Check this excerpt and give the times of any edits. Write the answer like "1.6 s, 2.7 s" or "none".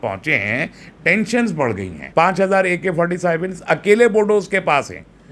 2.0 s

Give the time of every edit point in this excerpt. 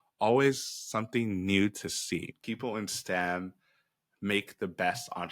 2.4 s

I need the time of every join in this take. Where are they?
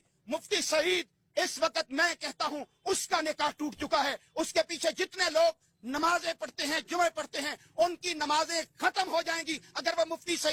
none

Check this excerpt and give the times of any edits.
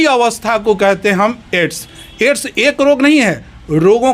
none

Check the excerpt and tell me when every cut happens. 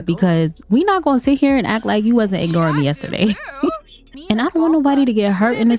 4.2 s

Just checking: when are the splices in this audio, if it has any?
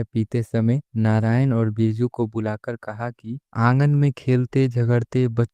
3.4 s

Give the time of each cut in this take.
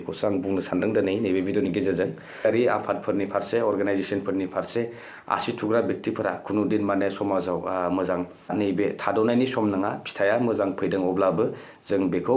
2.4 s, 8.5 s

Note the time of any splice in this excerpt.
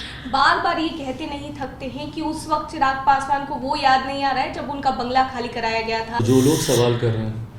6.2 s

